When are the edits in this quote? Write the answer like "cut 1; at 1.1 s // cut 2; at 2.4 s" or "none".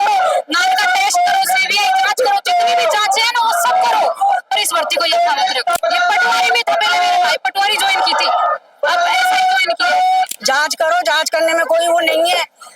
cut 1; at 5.8 s // cut 2; at 10.4 s